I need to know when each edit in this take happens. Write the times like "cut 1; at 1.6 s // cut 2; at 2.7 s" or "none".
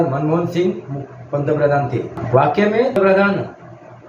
cut 1; at 2.2 s // cut 2; at 3.0 s